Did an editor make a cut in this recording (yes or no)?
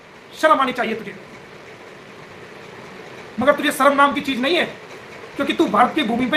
no